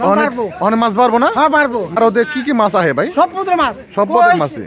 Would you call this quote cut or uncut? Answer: cut